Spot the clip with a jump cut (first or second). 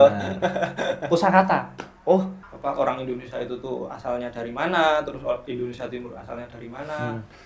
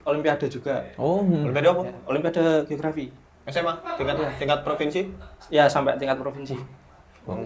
first